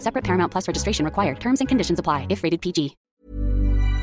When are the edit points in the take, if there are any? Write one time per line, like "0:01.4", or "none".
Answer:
0:03.0

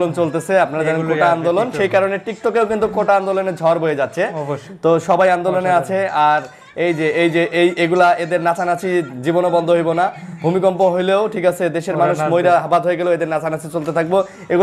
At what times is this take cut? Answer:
none

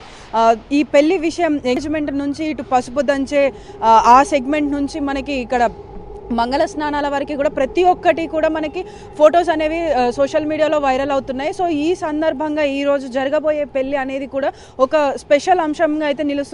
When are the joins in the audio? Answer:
0:01.8

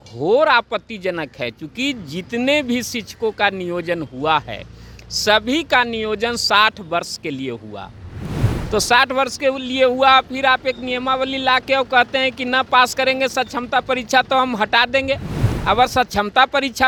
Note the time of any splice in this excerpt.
none

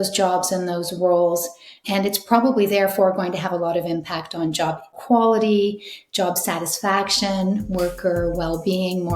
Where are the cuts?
0:05.0

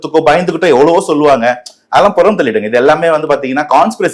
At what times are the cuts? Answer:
none

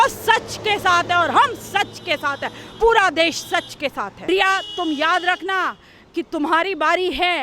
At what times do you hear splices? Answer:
0:04.3

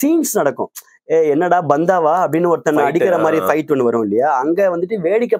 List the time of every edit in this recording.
none

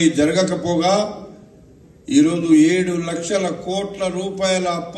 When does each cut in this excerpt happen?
0:02.1

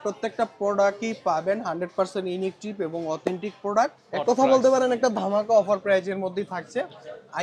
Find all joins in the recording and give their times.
0:04.0

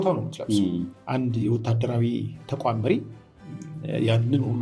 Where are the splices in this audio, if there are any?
0:00.9

